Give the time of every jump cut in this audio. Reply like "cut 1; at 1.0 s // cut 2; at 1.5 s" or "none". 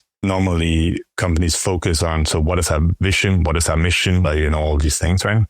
cut 1; at 4.2 s